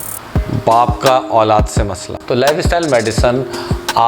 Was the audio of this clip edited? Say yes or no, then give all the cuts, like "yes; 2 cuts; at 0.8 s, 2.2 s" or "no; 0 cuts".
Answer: yes; 1 cut; at 2.1 s